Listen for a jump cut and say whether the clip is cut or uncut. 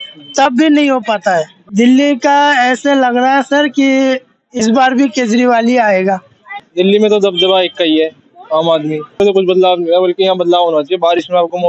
cut